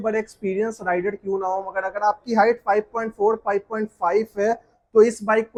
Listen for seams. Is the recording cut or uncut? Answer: uncut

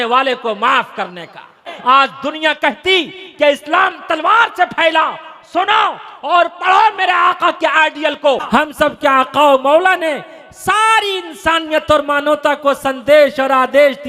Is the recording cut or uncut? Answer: cut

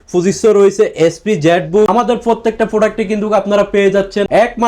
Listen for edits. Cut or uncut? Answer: cut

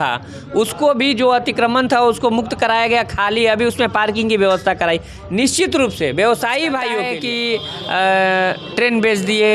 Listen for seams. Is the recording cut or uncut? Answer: cut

